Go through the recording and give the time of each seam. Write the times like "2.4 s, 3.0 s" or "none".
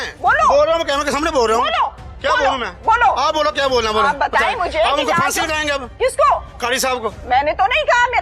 none